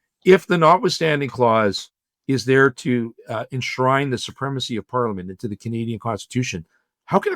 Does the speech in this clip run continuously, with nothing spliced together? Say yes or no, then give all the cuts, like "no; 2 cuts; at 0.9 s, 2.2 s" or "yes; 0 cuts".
yes; 0 cuts